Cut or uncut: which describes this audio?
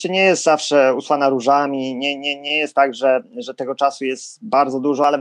uncut